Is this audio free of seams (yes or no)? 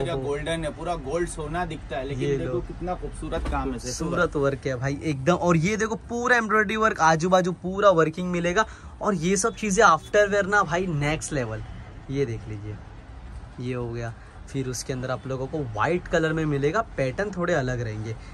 yes